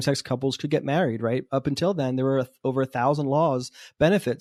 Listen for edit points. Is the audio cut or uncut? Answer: uncut